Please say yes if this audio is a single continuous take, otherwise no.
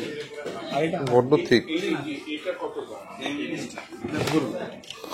yes